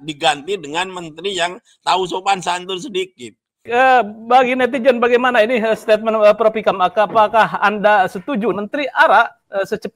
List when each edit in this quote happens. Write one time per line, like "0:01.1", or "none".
0:03.6
0:08.5

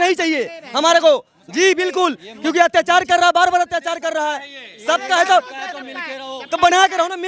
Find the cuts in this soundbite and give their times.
none

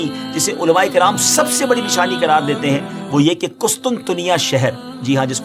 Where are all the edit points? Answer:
none

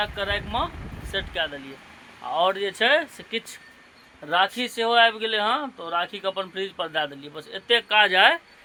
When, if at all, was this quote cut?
none

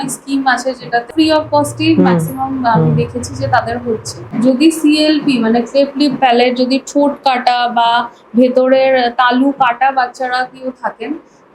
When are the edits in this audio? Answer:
0:01.1
0:04.2

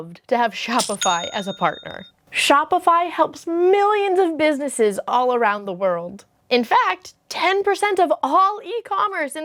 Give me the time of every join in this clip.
none

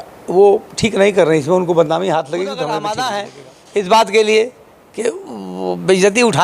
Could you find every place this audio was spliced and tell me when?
0:02.8

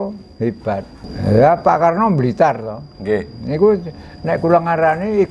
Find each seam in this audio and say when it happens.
0:01.0

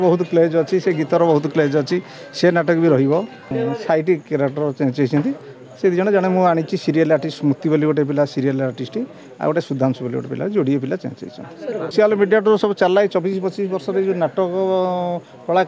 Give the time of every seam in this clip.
0:03.5
0:11.9

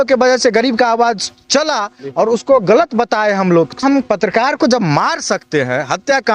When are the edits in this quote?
0:03.8

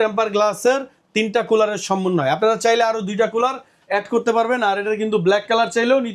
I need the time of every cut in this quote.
none

